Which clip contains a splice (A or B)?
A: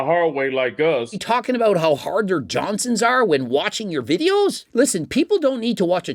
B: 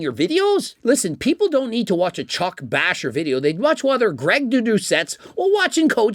A